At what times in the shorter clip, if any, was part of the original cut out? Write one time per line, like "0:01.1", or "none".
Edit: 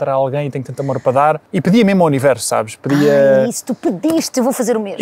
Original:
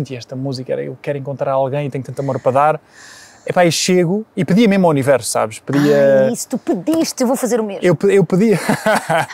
0:01.5